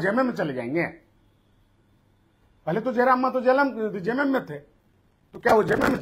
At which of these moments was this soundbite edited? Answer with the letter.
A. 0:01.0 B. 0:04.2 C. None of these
C